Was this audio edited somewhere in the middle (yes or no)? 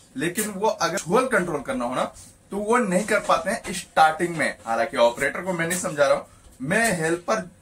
yes